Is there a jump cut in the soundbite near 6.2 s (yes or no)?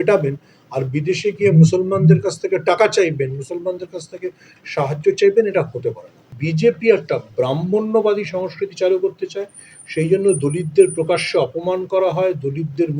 yes